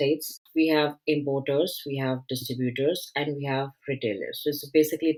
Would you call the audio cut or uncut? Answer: uncut